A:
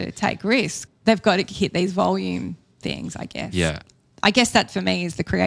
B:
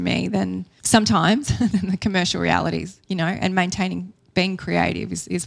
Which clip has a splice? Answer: A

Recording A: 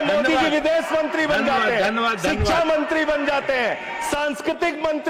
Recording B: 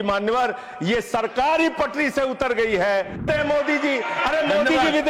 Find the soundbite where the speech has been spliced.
B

